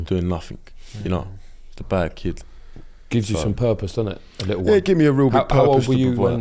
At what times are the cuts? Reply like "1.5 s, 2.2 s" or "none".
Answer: none

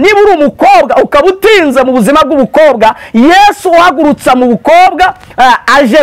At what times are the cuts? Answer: none

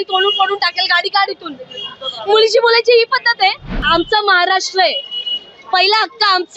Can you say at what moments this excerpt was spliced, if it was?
3.8 s

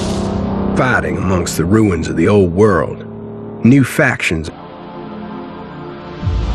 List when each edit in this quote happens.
4.5 s

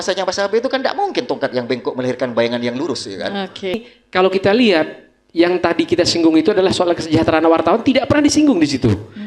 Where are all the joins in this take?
3.8 s

